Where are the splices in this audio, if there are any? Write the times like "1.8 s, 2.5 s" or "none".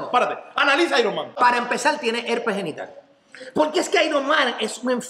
1.4 s